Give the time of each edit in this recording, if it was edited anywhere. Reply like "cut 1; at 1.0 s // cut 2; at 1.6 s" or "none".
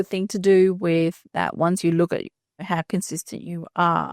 cut 1; at 2.6 s